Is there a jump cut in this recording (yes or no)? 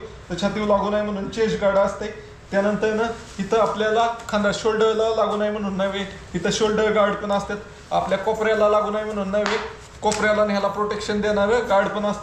no